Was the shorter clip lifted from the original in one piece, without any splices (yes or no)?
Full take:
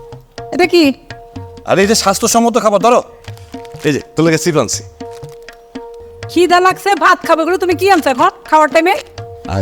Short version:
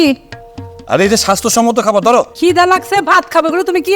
no